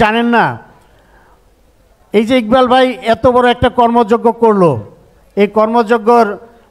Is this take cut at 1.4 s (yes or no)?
no